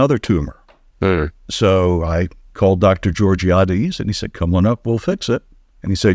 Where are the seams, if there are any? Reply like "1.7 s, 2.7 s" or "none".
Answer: 1.4 s, 2.4 s